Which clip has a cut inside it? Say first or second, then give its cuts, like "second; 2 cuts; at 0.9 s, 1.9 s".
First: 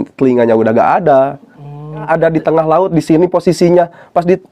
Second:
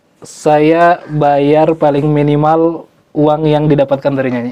first; 1 cut; at 2.0 s